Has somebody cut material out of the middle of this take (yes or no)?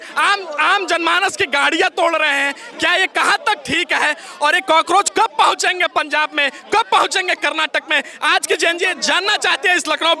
no